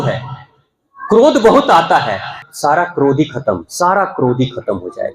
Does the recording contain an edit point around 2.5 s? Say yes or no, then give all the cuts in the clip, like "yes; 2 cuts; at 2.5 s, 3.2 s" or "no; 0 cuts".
yes; 1 cut; at 2.5 s